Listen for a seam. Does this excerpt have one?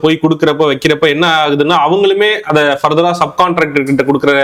no; 0 cuts

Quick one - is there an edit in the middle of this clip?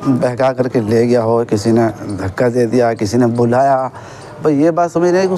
no; 0 cuts

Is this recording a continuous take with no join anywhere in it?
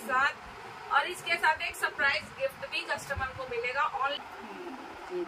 no; 1 cut; at 4.2 s

